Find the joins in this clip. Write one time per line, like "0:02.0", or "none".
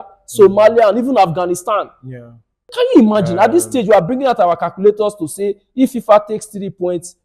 0:02.6